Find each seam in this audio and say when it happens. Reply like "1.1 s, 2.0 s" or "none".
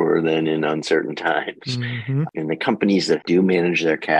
2.3 s, 3.2 s